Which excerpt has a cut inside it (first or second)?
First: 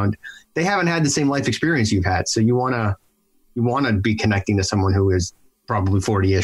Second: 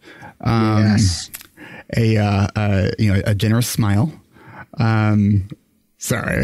first